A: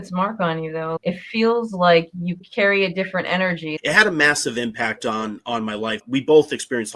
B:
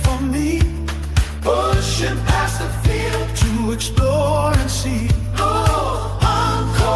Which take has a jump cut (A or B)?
A